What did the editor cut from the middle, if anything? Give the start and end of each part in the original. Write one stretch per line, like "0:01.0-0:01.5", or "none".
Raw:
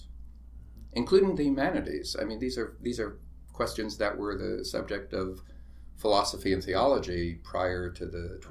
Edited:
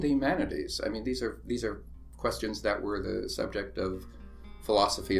none